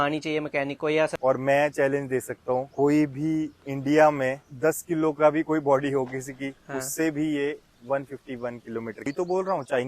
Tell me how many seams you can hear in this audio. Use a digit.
5